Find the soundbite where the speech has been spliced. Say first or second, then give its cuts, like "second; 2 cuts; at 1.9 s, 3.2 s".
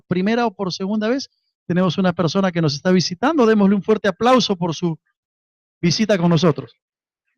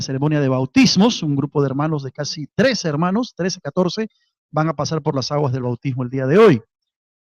second; 1 cut; at 3.4 s